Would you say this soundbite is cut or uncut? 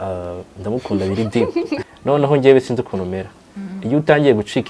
cut